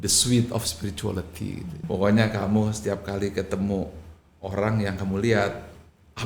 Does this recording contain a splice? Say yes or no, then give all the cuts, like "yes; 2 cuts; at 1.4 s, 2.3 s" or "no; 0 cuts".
yes; 1 cut; at 1.8 s